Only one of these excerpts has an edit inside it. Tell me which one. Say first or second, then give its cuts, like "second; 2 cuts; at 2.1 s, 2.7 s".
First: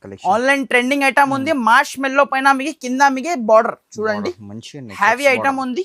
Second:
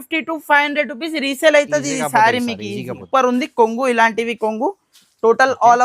second; 1 cut; at 3.0 s